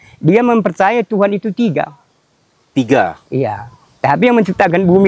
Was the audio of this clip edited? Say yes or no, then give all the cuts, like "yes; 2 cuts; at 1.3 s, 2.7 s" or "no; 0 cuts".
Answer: no; 0 cuts